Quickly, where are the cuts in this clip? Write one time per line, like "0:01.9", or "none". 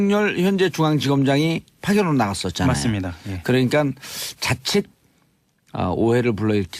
0:01.1